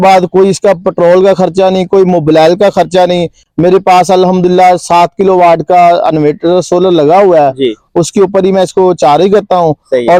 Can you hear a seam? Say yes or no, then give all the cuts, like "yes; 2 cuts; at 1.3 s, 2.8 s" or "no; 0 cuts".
no; 0 cuts